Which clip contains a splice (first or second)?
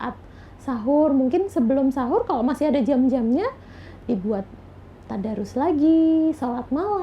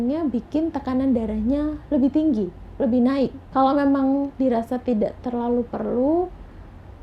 second